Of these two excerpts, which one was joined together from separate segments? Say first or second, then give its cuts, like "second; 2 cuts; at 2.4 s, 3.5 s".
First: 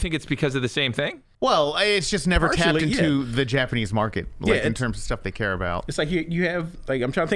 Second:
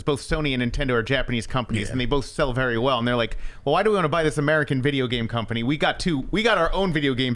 first; 1 cut; at 1.2 s